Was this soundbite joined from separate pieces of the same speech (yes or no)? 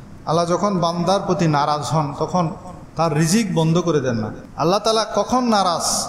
yes